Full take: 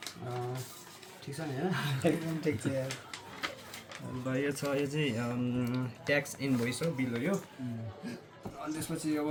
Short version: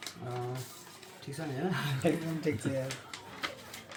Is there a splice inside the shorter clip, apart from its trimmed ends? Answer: no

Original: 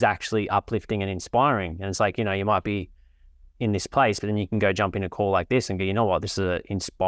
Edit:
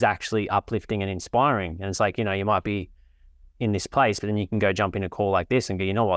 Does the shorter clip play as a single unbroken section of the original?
yes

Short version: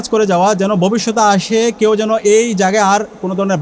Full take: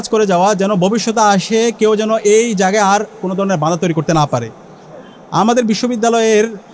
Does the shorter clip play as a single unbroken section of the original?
yes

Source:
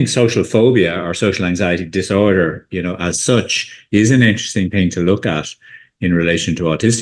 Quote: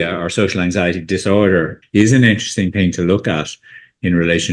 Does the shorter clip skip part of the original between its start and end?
yes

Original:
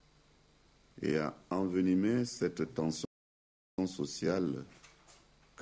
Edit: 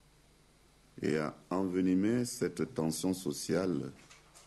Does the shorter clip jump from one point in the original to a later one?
yes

